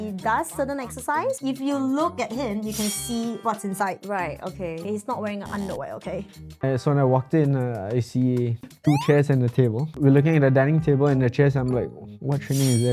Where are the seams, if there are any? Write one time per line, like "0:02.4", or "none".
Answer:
0:01.4
0:06.6
0:08.7
0:09.9